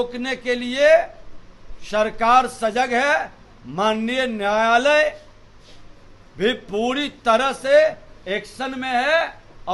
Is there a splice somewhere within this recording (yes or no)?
no